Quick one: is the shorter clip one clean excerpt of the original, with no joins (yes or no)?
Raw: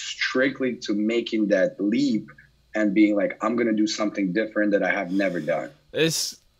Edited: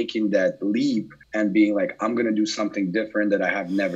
no